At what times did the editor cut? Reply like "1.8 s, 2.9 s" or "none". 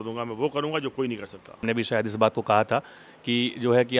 1.6 s

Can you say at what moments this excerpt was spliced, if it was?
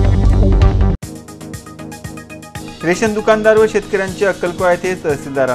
none

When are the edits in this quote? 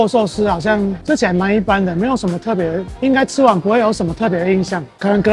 none

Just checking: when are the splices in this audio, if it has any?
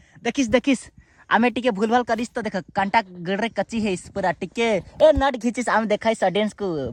none

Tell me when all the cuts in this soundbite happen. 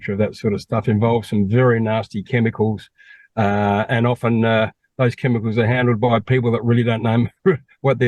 none

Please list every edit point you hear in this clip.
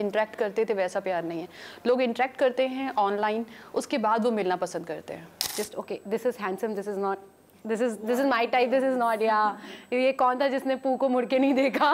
5.4 s

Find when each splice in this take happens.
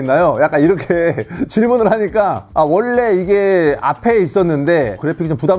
none

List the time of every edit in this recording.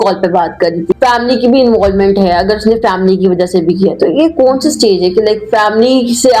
0.9 s

